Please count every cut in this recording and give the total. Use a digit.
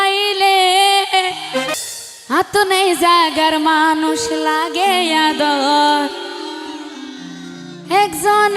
1